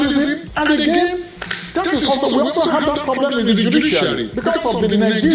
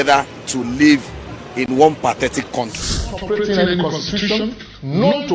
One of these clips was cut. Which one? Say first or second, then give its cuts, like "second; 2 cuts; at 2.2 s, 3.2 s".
second; 1 cut; at 3.2 s